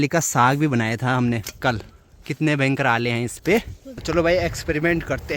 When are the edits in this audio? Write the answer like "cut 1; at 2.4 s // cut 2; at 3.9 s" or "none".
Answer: cut 1; at 1.9 s // cut 2; at 3.9 s

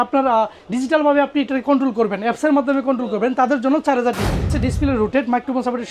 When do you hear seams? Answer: cut 1; at 4.5 s

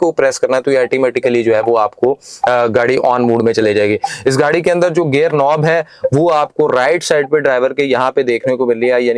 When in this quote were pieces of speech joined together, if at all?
none

